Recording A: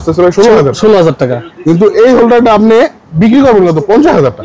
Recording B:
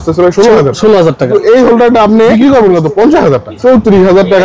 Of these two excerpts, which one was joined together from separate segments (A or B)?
B